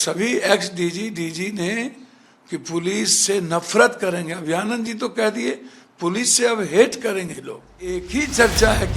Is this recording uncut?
no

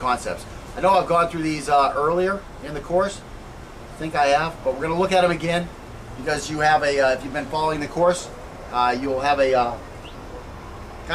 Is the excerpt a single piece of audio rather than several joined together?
no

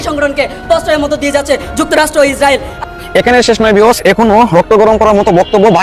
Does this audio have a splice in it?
no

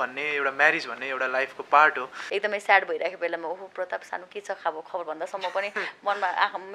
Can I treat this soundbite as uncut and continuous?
no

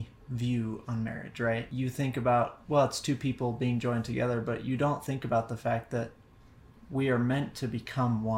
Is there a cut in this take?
yes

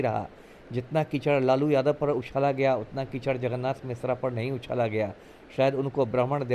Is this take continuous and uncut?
yes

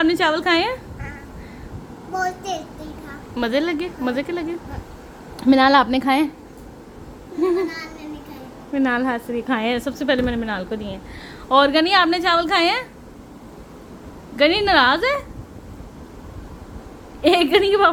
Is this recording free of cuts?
yes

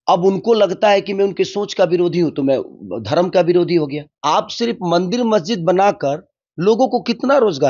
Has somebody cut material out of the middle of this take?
yes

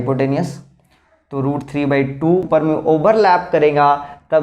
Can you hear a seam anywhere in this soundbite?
yes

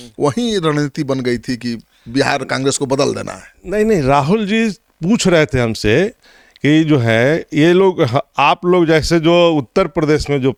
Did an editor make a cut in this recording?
no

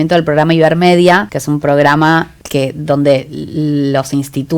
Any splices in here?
yes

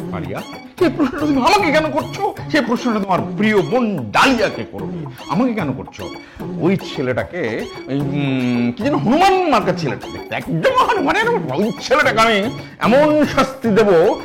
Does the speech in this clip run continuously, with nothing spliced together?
yes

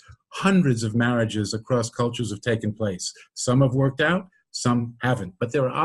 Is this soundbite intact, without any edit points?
yes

